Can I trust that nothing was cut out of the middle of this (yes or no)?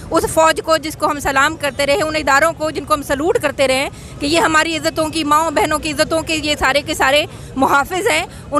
yes